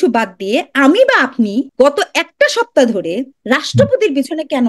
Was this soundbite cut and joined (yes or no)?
yes